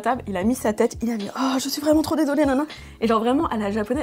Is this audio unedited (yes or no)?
yes